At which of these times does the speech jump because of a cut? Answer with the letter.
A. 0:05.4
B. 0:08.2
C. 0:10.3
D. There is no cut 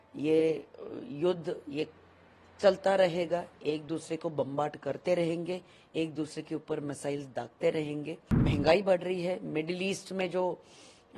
B